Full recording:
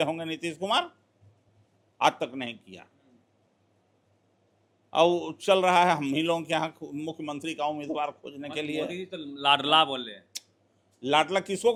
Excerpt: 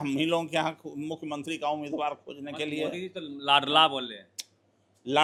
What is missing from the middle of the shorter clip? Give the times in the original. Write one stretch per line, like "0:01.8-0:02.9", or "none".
none